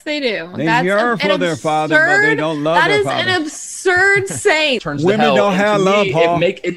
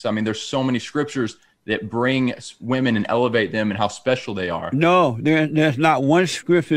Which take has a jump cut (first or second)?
first